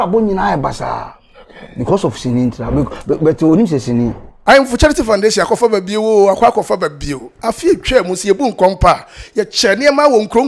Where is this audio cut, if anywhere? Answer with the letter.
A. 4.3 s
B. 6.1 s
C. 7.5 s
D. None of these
A